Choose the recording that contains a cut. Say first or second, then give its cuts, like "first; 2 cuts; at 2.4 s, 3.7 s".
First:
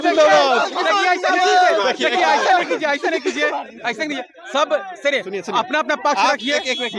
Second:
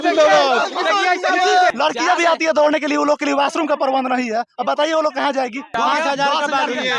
second; 2 cuts; at 1.7 s, 5.7 s